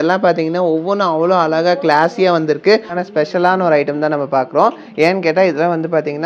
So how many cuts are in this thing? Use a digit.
1